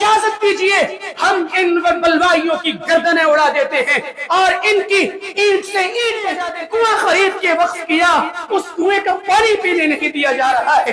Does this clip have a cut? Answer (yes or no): yes